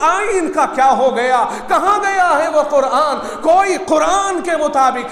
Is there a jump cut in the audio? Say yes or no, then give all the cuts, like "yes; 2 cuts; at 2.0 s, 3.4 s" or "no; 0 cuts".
no; 0 cuts